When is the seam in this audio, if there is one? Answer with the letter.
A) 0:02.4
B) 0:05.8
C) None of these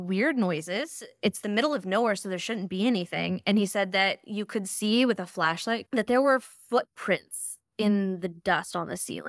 B